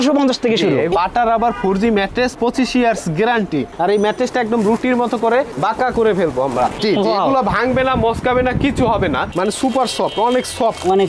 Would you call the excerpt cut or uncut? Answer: cut